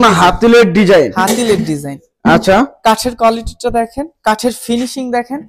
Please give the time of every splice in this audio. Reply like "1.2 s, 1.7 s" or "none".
none